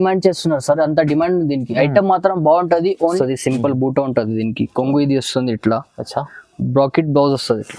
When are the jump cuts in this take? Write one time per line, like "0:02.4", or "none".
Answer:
0:03.2